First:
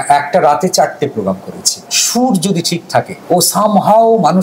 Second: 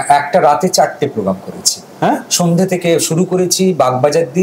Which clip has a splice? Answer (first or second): first